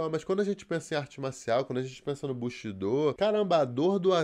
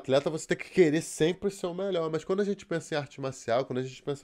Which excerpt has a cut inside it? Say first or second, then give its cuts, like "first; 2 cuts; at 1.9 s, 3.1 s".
first; 1 cut; at 3.2 s